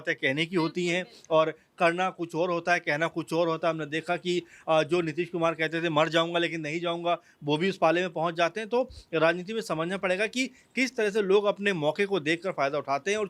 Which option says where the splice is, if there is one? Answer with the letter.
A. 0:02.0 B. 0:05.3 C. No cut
C